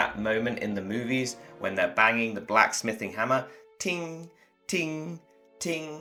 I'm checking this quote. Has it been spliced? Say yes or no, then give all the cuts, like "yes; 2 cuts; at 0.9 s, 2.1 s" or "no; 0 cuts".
no; 0 cuts